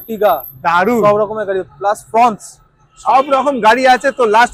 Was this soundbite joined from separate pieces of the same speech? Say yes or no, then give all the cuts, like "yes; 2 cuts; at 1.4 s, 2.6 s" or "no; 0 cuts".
no; 0 cuts